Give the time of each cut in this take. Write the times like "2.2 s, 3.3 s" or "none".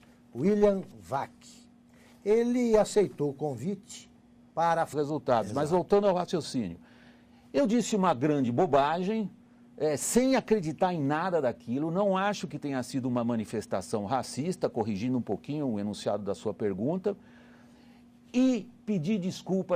none